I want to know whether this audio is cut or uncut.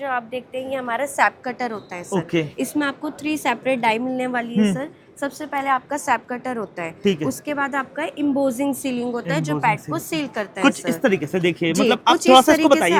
uncut